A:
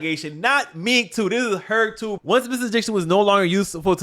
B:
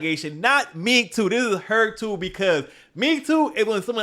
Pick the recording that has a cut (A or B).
A